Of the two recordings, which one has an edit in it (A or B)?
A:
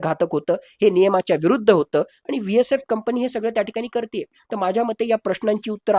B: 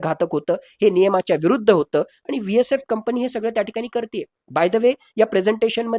A